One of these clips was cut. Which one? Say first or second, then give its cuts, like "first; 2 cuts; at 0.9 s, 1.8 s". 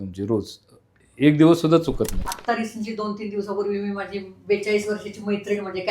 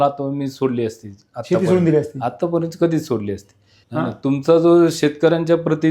first; 1 cut; at 2.3 s